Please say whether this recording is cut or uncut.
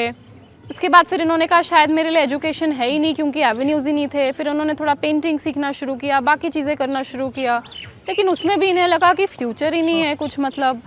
uncut